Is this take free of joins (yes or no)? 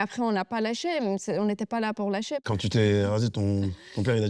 no